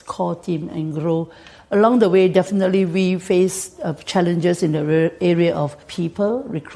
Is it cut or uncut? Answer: cut